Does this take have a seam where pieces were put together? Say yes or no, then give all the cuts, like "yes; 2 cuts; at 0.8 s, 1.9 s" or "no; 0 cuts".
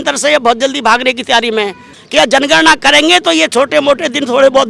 yes; 1 cut; at 1.9 s